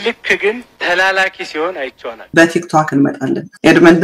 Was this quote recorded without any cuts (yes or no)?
no